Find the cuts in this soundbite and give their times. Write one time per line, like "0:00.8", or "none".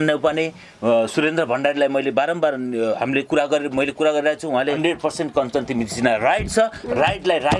0:04.8